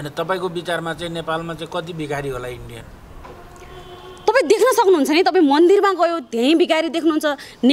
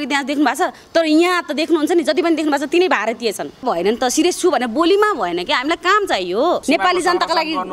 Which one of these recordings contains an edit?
second; 2 cuts; at 3.6 s, 6.6 s

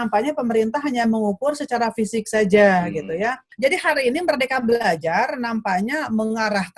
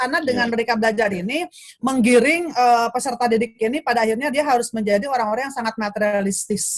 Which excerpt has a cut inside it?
first; 1 cut; at 3.4 s

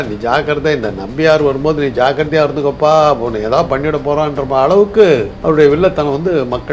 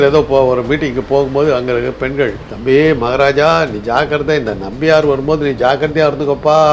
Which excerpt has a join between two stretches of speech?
first; 1 cut; at 5.3 s

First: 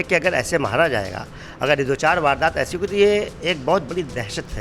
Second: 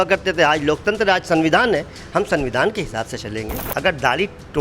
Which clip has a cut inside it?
second; 1 cut; at 3.6 s

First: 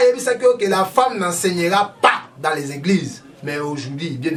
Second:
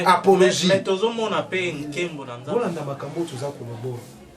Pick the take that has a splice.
second; 1 cut; at 2.3 s

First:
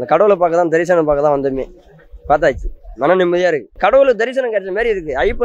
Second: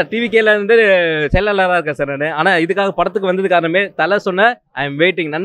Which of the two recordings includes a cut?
first; 1 cut; at 3.7 s

